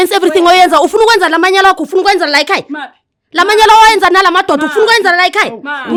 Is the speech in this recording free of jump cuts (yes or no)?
yes